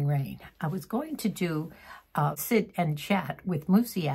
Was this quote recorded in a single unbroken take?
no; 1 cut; at 2.4 s

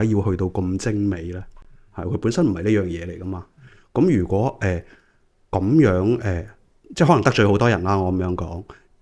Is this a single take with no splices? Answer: yes; 0 cuts

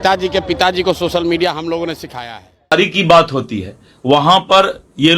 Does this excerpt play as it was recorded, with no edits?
no; 1 cut; at 2.7 s

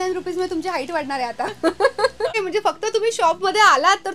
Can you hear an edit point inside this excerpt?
yes; 1 cut; at 2.4 s

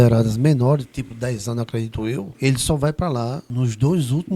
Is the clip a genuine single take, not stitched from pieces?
no; 2 cuts; at 2.3 s, 3.4 s

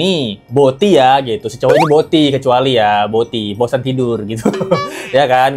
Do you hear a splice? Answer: no; 0 cuts

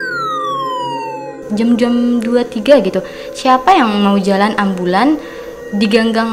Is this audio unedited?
yes; 0 cuts

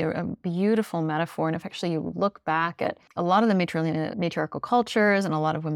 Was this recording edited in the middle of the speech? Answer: yes; 2 cuts; at 3.0 s, 4.1 s

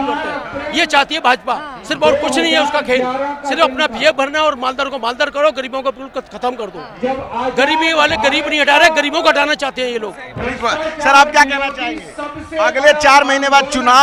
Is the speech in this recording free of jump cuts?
yes; 0 cuts

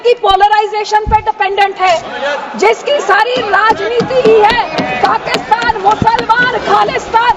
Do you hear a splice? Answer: no; 0 cuts

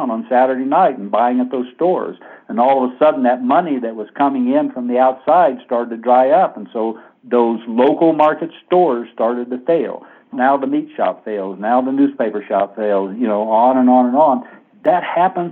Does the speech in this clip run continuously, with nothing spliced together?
no; 1 cut; at 10.3 s

